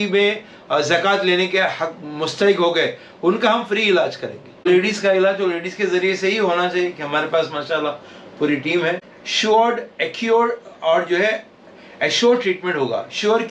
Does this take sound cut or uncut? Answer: cut